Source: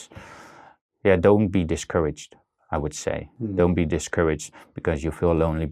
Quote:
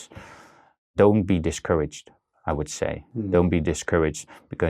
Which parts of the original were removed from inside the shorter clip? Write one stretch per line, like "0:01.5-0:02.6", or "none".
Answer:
0:00.9-0:01.2